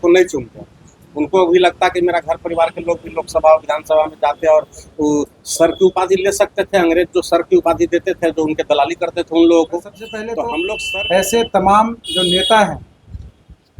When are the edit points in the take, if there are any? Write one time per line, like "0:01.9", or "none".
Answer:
0:10.5